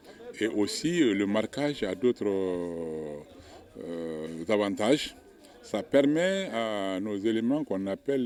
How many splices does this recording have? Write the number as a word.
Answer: zero